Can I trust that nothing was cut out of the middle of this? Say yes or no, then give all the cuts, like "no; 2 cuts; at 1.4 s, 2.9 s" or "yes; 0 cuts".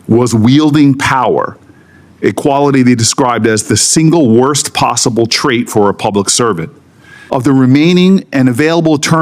no; 1 cut; at 7.1 s